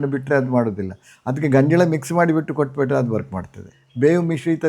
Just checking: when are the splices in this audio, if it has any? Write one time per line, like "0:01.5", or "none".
0:03.8